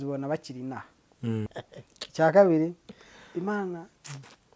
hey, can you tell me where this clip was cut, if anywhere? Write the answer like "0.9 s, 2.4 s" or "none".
1.5 s